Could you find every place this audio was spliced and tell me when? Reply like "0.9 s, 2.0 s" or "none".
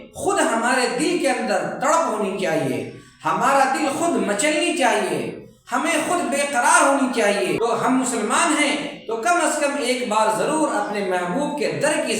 7.6 s